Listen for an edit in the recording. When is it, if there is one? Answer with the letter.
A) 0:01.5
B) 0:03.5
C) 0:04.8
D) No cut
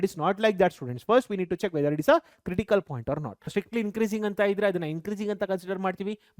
B